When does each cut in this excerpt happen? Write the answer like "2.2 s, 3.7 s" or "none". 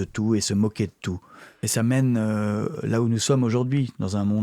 1.7 s